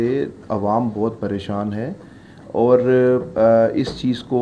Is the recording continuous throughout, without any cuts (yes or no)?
yes